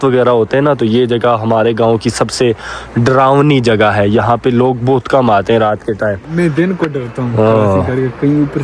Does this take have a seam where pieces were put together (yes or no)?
no